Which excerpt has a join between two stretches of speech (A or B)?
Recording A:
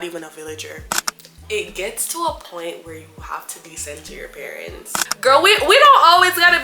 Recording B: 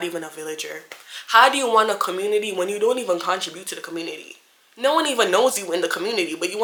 A